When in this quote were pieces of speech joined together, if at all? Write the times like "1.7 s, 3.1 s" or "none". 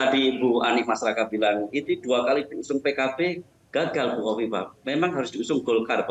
none

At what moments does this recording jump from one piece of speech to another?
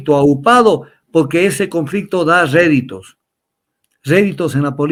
none

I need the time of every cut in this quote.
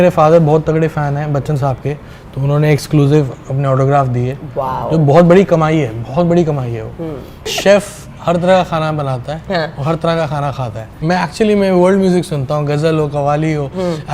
7.5 s, 11.0 s

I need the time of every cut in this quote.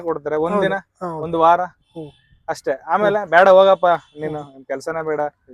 none

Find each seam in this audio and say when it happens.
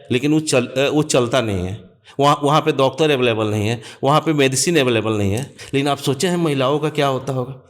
5.5 s

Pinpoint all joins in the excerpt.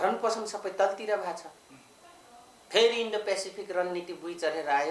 none

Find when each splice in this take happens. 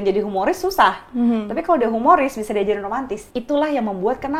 3.2 s

